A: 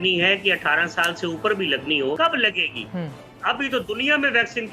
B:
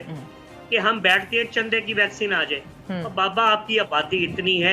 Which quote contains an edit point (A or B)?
A